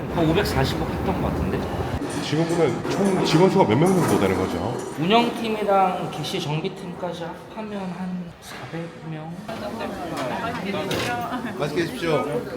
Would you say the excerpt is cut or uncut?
cut